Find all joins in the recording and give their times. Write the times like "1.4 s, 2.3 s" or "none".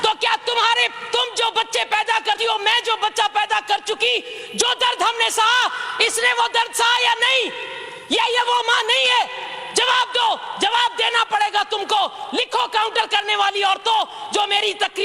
none